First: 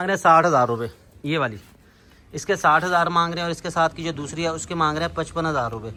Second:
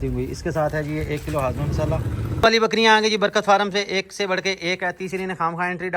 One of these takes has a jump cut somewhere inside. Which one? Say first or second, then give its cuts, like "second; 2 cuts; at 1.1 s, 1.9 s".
second; 1 cut; at 2.3 s